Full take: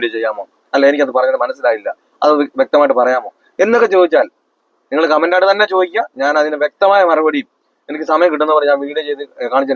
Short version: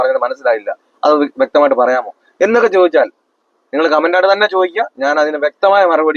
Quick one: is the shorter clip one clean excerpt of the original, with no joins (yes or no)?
yes